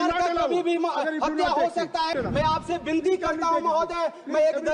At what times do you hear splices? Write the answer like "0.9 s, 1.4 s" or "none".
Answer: 2.1 s